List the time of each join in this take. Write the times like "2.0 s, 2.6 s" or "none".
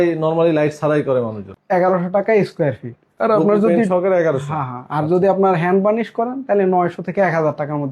1.6 s